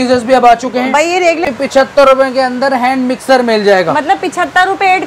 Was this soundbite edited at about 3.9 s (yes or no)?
no